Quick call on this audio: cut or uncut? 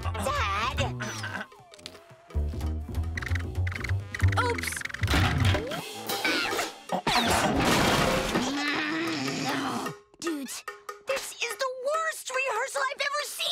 cut